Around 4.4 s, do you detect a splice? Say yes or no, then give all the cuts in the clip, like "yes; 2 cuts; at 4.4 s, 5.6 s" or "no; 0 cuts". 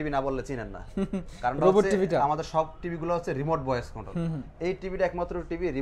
no; 0 cuts